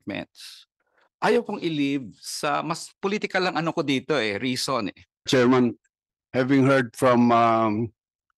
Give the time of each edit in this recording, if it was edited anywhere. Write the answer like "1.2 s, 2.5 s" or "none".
5.3 s